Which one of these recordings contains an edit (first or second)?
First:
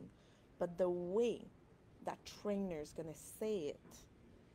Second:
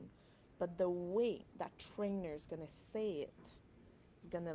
second